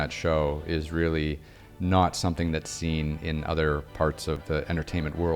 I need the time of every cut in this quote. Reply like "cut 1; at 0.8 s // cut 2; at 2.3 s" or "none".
cut 1; at 4.4 s